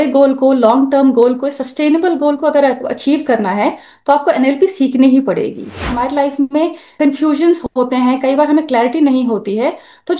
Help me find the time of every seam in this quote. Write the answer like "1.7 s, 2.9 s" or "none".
5.9 s, 7.0 s